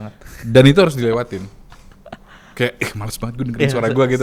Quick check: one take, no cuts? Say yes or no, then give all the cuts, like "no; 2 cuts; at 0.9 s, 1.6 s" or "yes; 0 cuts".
yes; 0 cuts